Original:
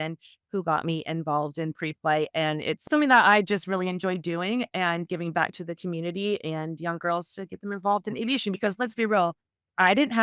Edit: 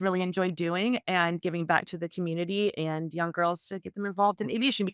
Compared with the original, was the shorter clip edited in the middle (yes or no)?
no